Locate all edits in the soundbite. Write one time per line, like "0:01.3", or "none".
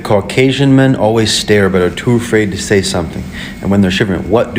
none